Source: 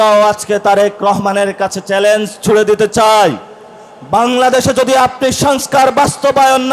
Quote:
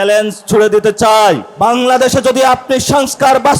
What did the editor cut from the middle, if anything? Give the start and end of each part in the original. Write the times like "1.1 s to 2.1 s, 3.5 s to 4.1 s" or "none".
3.4 s to 4.0 s